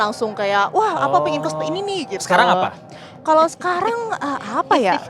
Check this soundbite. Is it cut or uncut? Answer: uncut